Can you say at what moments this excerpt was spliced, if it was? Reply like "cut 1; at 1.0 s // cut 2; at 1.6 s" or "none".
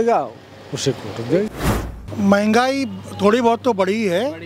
cut 1; at 1.5 s